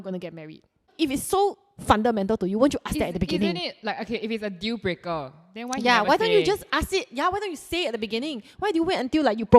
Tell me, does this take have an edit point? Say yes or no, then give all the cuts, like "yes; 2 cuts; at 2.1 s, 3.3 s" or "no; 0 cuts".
yes; 1 cut; at 0.9 s